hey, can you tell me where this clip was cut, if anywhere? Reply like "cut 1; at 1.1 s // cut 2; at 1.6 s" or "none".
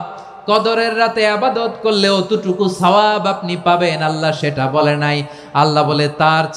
none